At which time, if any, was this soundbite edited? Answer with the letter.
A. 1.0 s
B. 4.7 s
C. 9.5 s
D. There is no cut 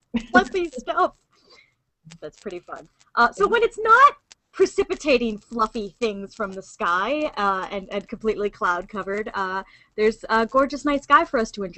B